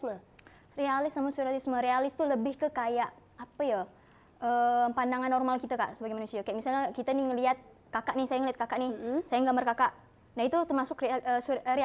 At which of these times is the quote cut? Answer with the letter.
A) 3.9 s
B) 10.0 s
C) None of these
C